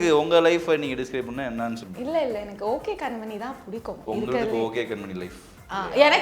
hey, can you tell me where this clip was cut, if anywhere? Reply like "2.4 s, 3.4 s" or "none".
1.9 s